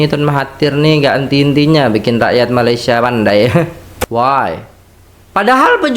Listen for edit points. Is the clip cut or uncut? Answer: cut